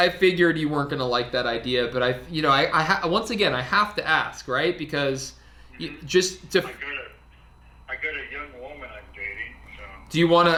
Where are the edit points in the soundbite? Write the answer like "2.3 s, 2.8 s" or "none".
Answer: none